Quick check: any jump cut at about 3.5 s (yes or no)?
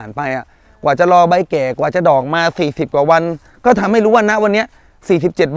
no